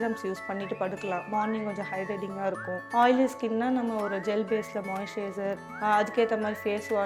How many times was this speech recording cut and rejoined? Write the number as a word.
two